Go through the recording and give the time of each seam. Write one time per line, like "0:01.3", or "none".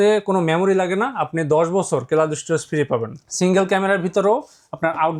none